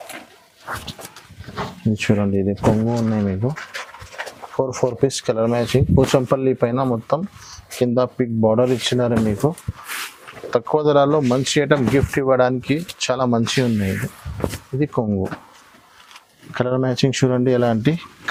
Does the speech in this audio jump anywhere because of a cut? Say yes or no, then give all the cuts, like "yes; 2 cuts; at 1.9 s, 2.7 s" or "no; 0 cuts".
no; 0 cuts